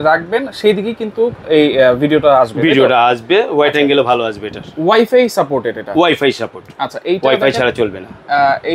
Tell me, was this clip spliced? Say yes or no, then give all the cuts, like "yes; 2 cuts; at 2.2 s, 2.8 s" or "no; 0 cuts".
no; 0 cuts